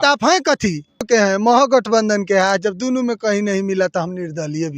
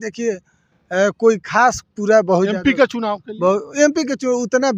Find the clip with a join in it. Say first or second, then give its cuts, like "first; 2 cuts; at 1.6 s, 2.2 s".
first; 1 cut; at 1.1 s